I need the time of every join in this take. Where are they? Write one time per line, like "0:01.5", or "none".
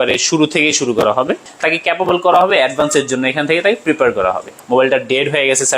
0:01.5
0:04.5